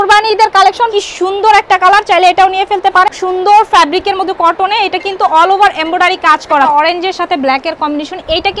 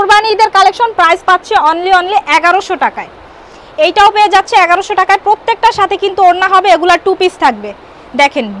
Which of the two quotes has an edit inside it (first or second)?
first